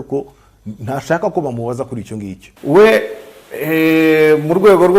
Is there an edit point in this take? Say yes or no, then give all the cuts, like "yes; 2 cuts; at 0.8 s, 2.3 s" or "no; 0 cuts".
yes; 1 cut; at 2.4 s